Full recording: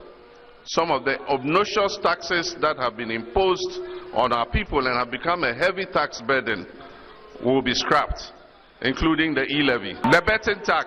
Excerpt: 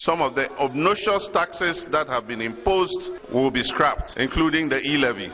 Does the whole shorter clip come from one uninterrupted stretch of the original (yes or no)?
no